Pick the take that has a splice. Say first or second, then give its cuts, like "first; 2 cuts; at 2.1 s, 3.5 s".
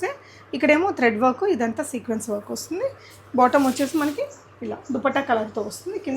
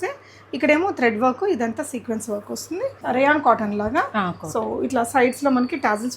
second; 1 cut; at 3.0 s